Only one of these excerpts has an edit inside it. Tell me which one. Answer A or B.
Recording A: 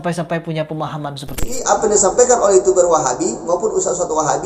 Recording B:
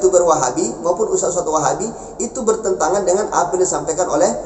A